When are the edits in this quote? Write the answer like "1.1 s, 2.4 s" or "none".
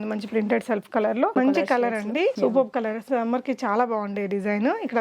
1.3 s, 2.4 s